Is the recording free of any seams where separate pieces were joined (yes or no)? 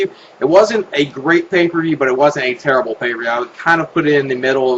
yes